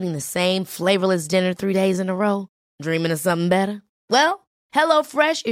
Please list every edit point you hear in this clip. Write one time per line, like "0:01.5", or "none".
none

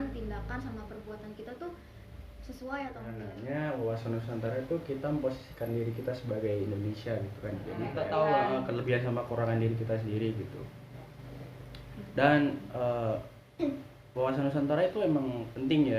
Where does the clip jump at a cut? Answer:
0:03.3
0:07.9

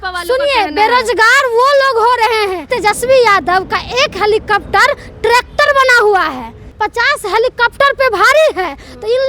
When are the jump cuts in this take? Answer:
0:02.7
0:06.6

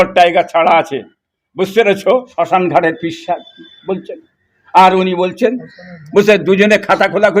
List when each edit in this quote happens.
0:02.3

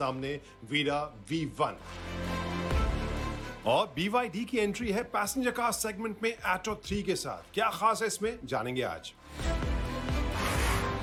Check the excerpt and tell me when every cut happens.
none

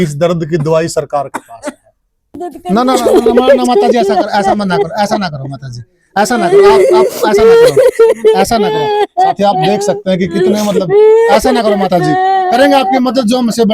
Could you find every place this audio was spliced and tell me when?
0:02.4

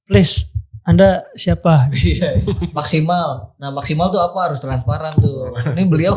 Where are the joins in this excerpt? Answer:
0:02.7

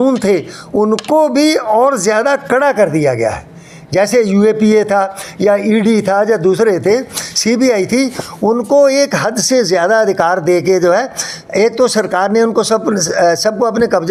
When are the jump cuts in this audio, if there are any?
none

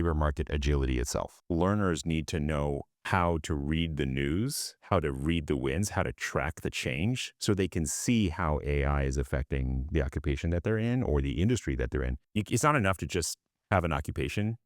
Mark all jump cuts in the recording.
0:01.4
0:02.9
0:12.2

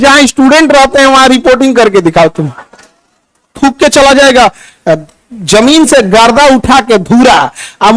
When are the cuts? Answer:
0:03.5

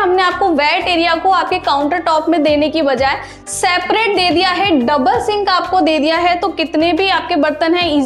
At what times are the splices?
none

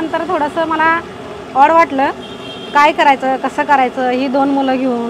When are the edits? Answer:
none

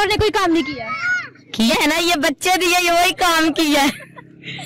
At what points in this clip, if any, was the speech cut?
0:01.7

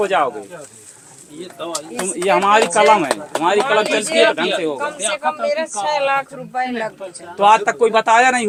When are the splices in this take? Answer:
none

